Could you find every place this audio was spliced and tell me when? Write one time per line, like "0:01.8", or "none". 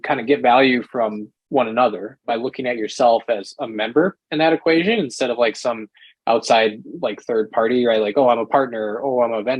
0:02.1